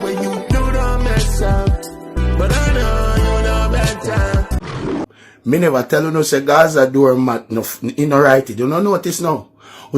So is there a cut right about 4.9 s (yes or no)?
yes